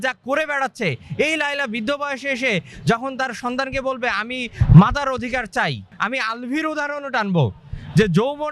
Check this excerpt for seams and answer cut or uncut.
cut